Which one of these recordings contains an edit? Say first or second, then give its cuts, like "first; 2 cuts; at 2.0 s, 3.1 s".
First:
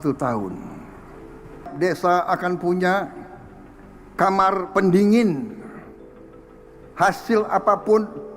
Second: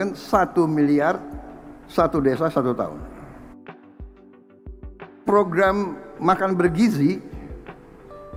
first; 1 cut; at 1.7 s